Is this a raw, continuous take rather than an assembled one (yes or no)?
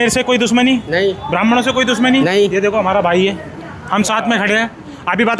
yes